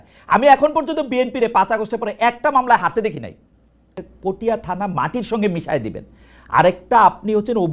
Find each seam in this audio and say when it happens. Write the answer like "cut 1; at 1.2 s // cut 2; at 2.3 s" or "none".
cut 1; at 4.1 s